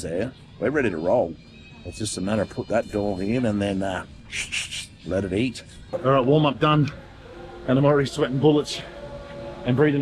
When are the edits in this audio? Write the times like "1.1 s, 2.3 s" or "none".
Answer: none